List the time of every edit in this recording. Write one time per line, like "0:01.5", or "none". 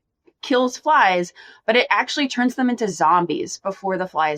none